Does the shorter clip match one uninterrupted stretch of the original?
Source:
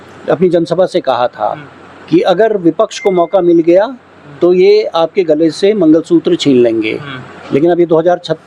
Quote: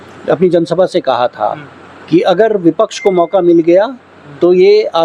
yes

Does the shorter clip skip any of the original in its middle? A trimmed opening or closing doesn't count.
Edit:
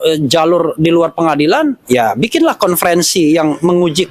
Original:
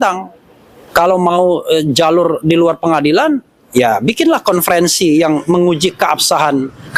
yes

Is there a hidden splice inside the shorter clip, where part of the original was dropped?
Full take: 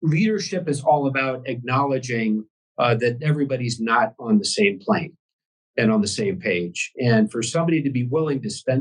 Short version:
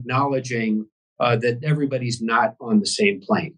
no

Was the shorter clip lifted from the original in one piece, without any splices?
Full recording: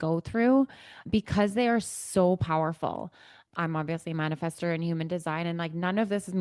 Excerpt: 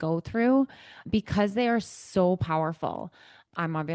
yes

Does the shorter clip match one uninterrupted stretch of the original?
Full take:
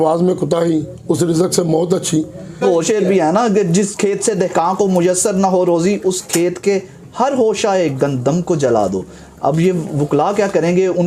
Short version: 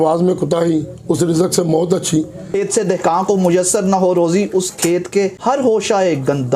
no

